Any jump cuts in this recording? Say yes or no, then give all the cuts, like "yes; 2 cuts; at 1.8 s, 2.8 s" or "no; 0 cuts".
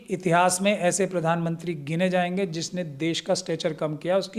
no; 0 cuts